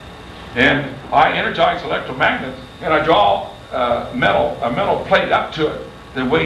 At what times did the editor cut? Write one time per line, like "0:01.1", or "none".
0:03.3